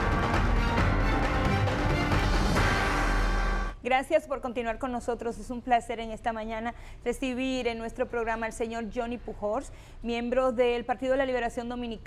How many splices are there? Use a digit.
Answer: 1